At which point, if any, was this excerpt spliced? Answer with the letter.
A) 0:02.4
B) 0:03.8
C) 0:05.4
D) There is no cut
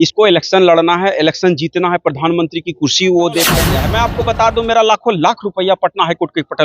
B